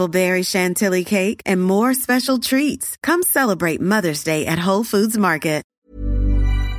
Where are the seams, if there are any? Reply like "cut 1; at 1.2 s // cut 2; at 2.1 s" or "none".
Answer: cut 1; at 5.6 s